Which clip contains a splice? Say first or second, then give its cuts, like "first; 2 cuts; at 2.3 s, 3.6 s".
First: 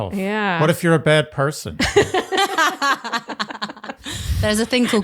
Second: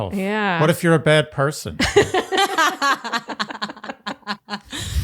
first; 1 cut; at 4.0 s